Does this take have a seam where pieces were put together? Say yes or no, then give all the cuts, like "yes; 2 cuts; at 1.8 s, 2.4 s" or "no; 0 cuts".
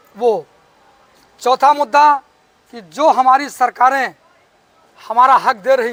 no; 0 cuts